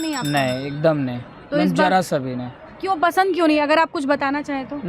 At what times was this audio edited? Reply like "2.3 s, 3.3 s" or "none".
none